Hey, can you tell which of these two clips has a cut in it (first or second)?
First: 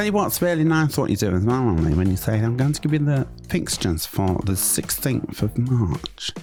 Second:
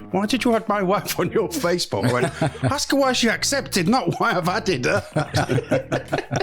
second